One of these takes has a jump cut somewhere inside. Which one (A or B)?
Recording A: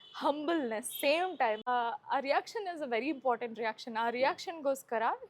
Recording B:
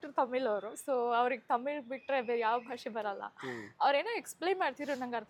A